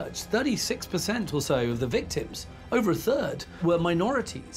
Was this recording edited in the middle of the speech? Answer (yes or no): yes